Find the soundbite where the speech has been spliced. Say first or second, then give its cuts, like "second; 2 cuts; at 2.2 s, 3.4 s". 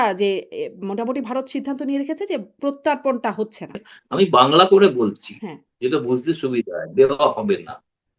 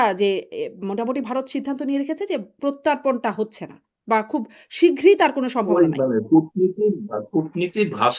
first; 1 cut; at 3.9 s